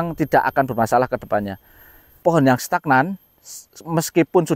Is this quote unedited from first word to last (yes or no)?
no